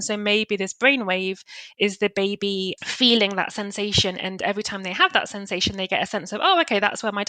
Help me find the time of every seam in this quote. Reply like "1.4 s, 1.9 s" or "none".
2.8 s